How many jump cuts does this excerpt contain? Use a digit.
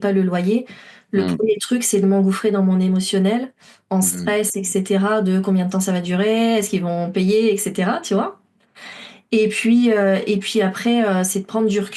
0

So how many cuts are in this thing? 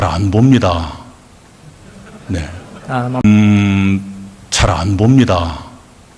0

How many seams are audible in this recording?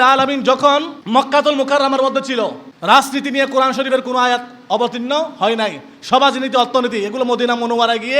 2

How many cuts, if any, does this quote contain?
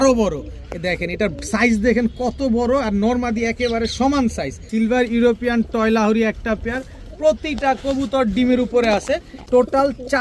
2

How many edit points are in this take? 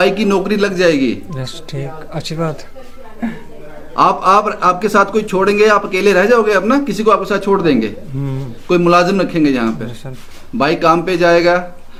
0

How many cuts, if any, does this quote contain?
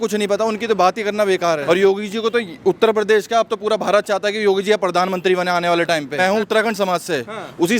2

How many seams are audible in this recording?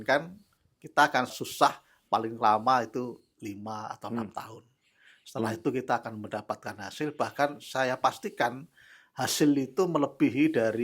1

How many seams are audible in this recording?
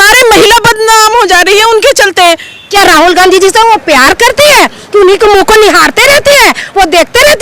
1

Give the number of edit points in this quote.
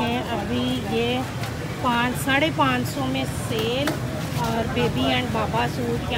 0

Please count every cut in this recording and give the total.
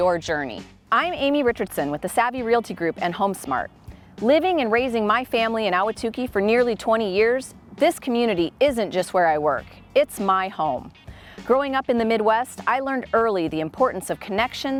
0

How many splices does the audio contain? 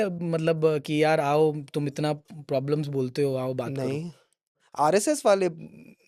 0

